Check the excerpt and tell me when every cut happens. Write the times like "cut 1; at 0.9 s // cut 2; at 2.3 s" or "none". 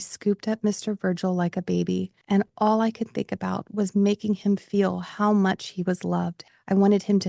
cut 1; at 2.1 s // cut 2; at 6.4 s